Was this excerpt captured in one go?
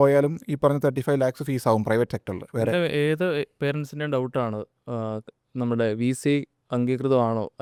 yes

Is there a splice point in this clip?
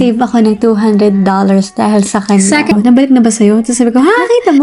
yes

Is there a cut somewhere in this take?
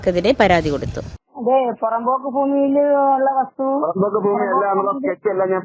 yes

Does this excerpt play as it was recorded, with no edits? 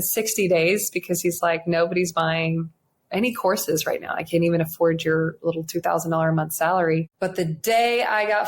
no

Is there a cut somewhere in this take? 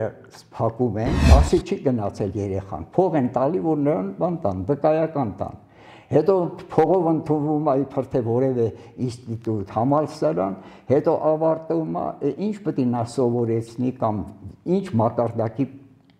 yes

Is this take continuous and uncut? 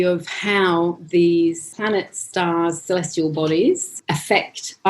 no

